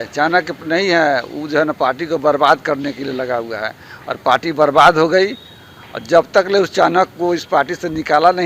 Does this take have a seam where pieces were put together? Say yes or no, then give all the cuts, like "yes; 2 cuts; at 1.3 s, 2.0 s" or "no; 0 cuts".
no; 0 cuts